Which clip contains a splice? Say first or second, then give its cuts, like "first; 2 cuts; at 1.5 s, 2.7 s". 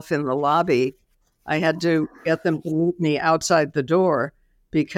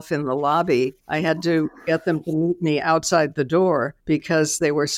second; 2 cuts; at 1.0 s, 3.9 s